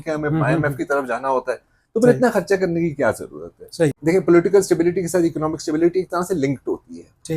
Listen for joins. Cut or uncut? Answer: cut